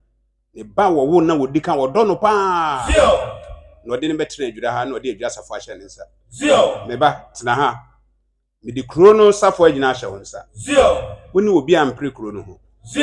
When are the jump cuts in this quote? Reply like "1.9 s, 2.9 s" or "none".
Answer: none